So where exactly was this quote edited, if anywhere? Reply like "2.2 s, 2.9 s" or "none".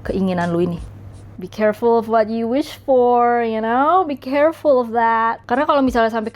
1.4 s